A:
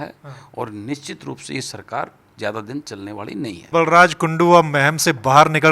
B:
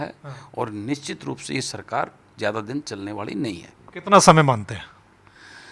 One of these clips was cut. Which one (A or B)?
A